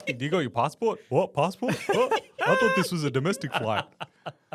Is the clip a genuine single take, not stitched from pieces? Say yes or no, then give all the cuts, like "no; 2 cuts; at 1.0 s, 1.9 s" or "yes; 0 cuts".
yes; 0 cuts